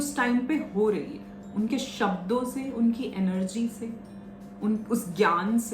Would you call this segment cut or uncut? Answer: uncut